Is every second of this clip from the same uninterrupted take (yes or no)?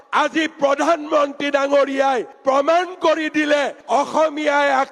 yes